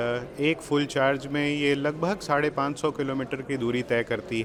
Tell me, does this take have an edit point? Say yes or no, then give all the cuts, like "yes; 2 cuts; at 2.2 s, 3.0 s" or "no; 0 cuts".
no; 0 cuts